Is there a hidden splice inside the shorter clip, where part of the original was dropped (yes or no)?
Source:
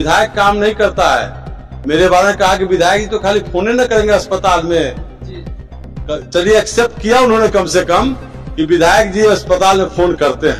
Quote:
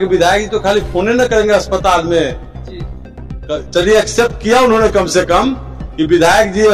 no